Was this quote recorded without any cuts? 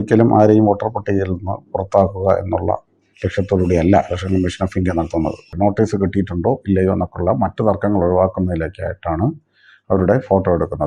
no; 1 cut; at 5.5 s

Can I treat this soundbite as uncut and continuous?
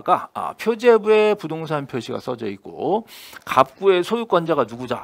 yes; 0 cuts

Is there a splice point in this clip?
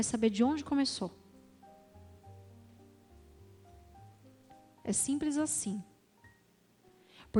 no; 0 cuts

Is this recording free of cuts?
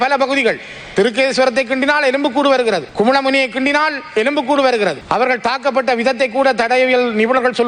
no; 1 cut; at 5.0 s

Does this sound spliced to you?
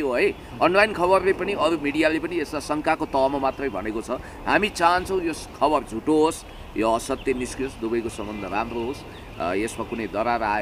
no; 0 cuts

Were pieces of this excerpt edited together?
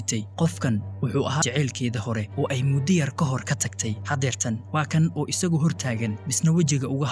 yes; 2 cuts; at 1.4 s, 4.0 s

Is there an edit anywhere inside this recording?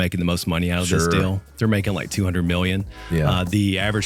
no; 0 cuts

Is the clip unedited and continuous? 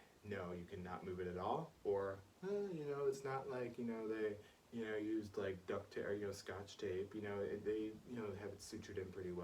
yes; 0 cuts

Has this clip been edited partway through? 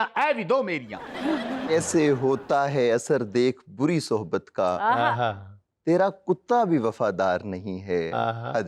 yes; 1 cut; at 1.7 s

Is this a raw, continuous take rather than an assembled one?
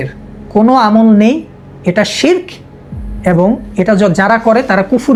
yes; 0 cuts

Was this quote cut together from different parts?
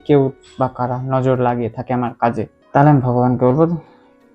no; 0 cuts

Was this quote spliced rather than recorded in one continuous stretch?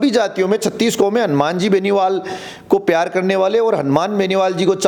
no; 0 cuts

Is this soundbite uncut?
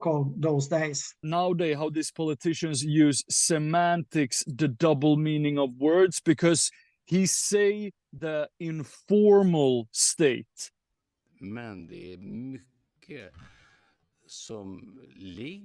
no; 1 cut; at 1.2 s

